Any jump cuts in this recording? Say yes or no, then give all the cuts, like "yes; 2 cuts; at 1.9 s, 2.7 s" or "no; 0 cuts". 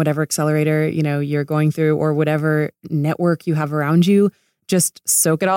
no; 0 cuts